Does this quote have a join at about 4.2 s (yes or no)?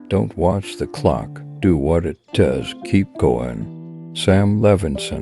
no